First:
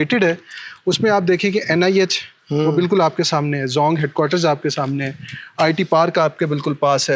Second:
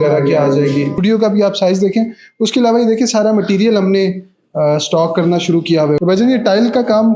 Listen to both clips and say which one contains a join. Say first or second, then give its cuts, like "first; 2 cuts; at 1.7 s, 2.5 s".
second; 2 cuts; at 1.0 s, 6.0 s